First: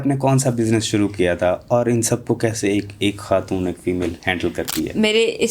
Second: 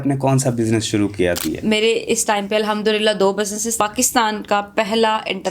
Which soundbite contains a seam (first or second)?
second